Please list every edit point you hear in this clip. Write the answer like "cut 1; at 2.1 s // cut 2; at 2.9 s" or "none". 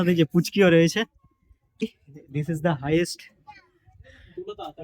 cut 1; at 1.8 s

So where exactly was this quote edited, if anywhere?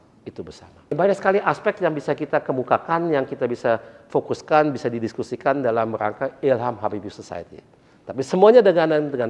cut 1; at 1.0 s

